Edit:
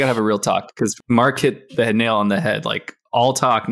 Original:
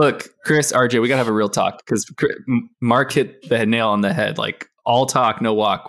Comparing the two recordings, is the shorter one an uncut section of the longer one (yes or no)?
no